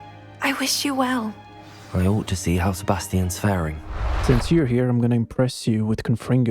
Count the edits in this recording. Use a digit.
1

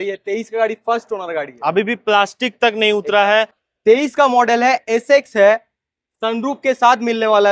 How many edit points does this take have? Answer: 1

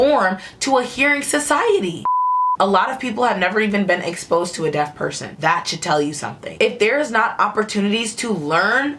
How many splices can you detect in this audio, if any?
1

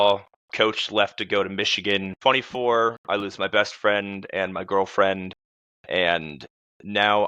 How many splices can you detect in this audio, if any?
1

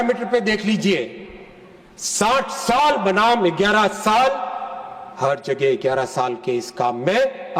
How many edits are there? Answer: 0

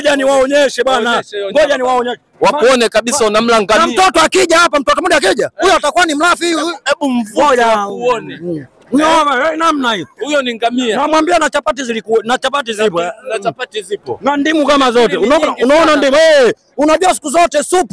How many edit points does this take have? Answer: 0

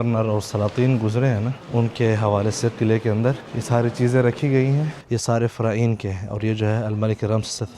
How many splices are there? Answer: 3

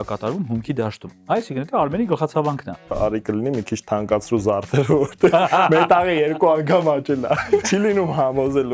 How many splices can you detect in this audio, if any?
3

